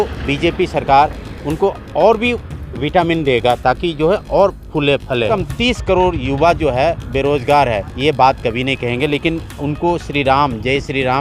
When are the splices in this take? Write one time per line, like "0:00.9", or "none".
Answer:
0:05.3

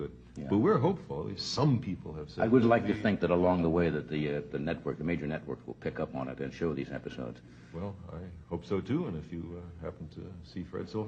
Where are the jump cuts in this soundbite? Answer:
none

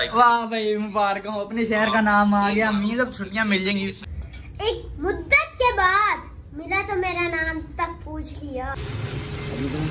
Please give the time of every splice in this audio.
0:04.2
0:08.7

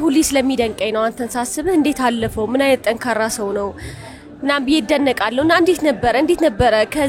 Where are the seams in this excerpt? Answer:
none

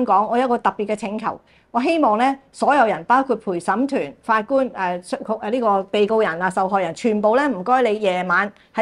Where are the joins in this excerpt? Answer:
none

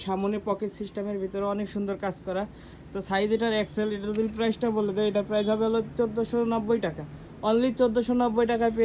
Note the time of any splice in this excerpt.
none

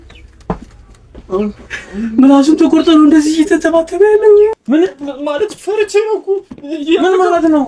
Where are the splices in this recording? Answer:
0:04.6

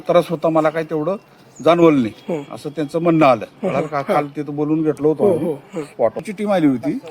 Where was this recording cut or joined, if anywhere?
0:06.2

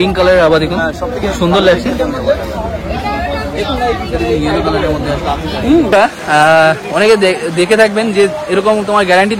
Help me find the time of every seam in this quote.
0:05.9

